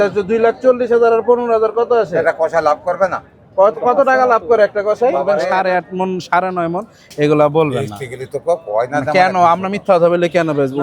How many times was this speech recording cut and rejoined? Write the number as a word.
one